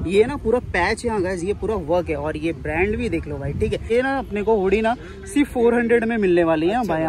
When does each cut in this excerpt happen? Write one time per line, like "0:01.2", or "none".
0:03.8